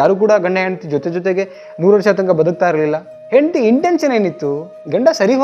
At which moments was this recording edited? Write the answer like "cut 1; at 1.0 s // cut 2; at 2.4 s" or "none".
cut 1; at 3.1 s